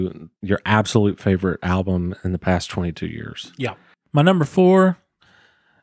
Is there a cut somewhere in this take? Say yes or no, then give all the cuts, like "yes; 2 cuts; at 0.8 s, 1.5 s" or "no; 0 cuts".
yes; 1 cut; at 3.9 s